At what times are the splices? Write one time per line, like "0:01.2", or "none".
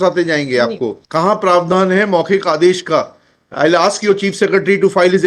0:01.0